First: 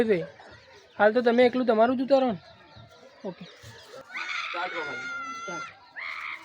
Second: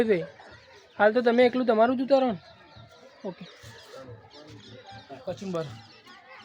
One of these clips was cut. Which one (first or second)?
first